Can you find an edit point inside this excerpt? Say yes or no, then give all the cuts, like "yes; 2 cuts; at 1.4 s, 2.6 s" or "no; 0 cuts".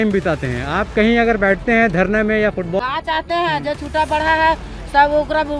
yes; 1 cut; at 2.8 s